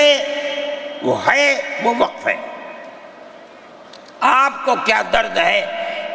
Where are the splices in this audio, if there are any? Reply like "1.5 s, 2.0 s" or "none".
none